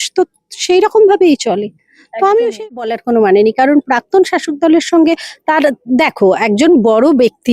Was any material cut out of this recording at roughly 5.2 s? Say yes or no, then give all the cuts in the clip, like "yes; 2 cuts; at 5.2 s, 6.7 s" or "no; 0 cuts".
no; 1 cut; at 2.7 s